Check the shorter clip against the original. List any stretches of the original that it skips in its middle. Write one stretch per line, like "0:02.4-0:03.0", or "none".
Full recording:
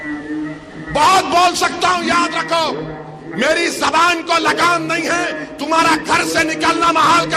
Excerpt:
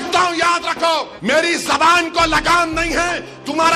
0:02.8-0:03.2